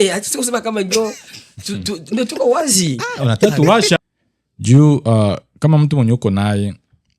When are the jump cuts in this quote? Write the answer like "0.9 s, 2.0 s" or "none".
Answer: 4.0 s